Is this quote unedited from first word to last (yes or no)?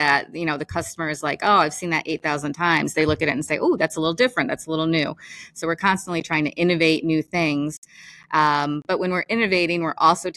yes